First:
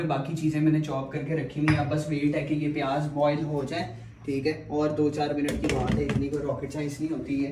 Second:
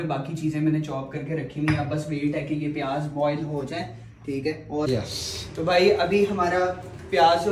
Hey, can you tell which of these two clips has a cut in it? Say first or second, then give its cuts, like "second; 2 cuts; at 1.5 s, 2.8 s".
second; 1 cut; at 4.9 s